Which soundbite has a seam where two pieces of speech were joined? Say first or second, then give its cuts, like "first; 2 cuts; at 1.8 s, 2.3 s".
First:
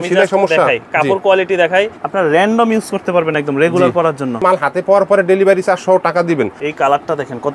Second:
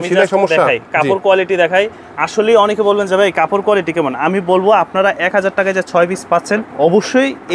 first; 3 cuts; at 2.0 s, 4.4 s, 6.6 s